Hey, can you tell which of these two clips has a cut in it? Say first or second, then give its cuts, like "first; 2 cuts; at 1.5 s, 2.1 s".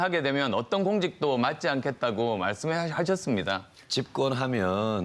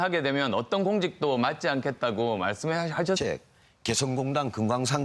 first; 1 cut; at 3.2 s